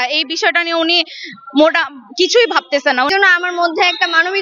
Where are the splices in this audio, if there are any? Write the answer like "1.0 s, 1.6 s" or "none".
3.1 s